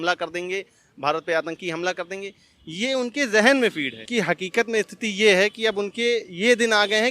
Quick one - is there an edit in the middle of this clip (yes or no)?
yes